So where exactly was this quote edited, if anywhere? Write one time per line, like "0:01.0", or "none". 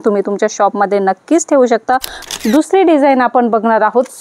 0:02.2